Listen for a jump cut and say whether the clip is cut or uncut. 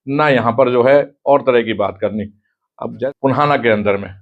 cut